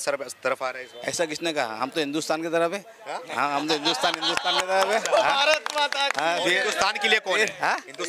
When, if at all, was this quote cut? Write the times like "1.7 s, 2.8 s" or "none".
none

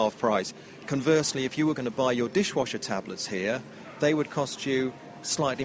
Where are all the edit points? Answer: none

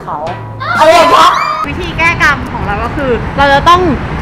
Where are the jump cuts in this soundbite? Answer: 1.5 s

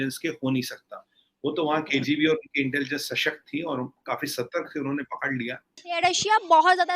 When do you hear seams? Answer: 5.8 s

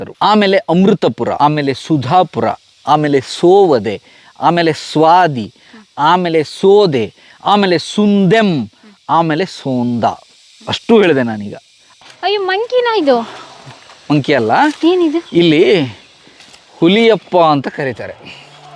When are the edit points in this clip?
1.3 s, 11.9 s

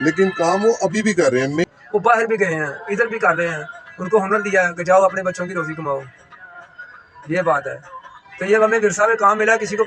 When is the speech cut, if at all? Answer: 1.6 s

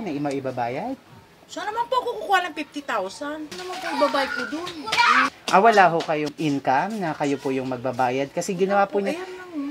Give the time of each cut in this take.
3.6 s, 5.3 s, 6.3 s

